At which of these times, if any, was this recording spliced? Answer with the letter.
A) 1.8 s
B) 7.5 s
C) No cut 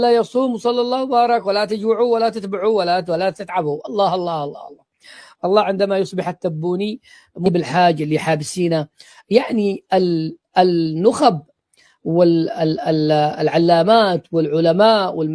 B